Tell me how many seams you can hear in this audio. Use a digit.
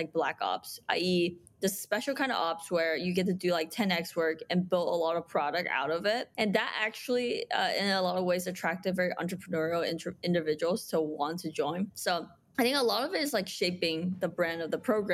0